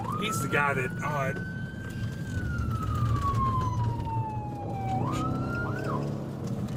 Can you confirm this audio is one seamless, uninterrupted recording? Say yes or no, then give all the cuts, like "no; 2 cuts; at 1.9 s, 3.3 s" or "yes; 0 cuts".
yes; 0 cuts